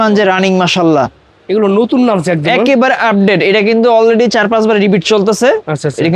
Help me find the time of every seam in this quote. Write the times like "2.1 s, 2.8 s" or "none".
none